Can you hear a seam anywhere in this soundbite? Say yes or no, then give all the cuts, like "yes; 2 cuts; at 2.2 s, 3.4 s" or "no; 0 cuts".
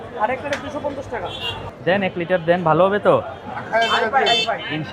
yes; 1 cut; at 1.6 s